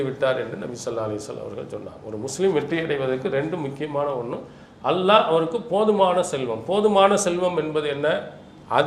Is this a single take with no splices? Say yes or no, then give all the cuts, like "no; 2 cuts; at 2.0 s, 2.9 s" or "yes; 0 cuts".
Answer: yes; 0 cuts